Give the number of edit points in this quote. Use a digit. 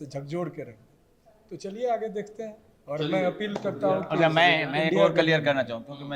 0